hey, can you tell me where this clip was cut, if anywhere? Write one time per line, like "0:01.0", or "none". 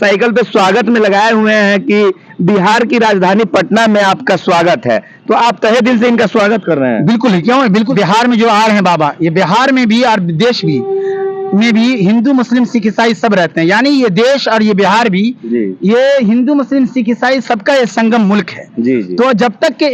0:07.9